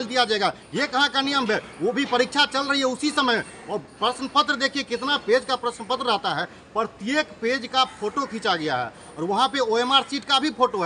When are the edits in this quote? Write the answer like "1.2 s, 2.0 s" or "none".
none